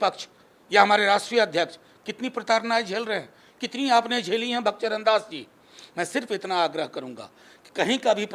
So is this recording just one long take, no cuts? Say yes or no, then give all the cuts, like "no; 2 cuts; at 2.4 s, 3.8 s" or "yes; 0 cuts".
yes; 0 cuts